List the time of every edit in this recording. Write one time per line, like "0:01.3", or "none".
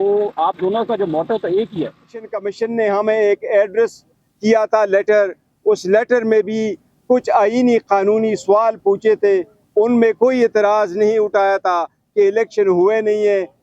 0:02.4

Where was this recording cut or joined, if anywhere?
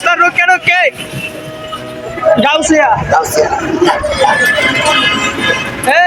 none

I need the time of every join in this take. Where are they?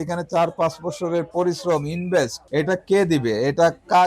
0:02.4

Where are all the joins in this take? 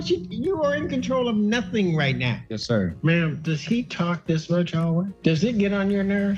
0:02.8
0:05.1

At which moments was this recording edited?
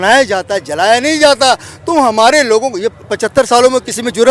none

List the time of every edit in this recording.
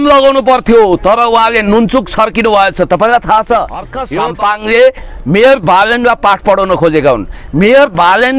0:04.0

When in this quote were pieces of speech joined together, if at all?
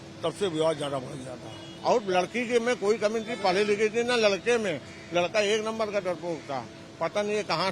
0:01.7

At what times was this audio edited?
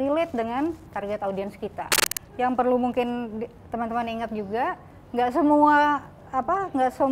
0:02.2

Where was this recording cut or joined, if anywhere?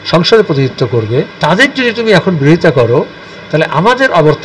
0:01.3

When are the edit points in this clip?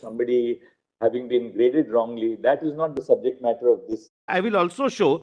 0:04.3

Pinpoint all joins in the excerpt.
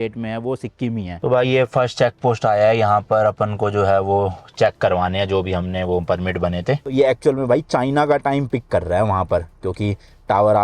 0:01.2
0:06.8

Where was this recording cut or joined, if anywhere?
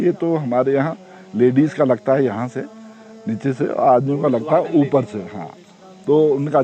none

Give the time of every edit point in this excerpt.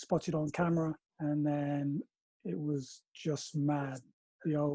0:01.1

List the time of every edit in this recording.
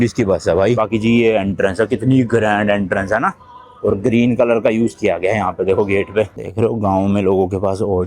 0:00.8
0:06.4

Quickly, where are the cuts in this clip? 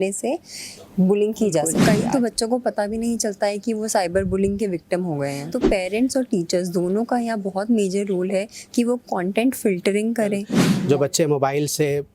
0:01.7
0:05.5
0:10.7

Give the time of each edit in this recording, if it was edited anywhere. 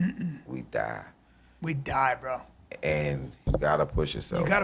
0:03.5

